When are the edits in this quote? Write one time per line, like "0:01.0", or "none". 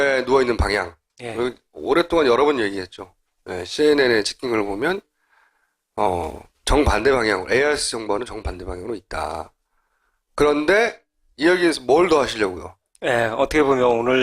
0:06.5